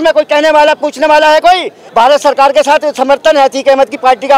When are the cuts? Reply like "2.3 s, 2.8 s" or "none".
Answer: 1.8 s